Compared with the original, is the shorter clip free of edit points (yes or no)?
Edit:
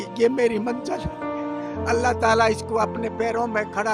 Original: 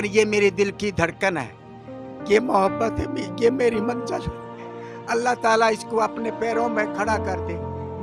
yes